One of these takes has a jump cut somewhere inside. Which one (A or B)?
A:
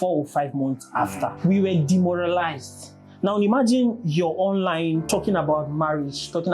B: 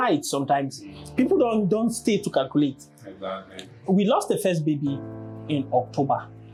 A